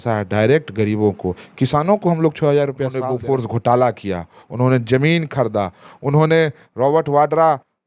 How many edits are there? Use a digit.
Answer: 1